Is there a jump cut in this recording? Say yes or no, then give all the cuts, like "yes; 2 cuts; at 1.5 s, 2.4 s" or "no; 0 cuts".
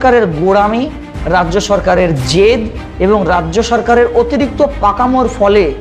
no; 0 cuts